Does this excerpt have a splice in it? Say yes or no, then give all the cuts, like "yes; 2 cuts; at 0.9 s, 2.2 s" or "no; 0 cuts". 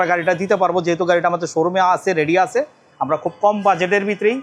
no; 0 cuts